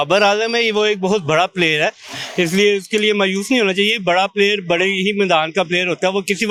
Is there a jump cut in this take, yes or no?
no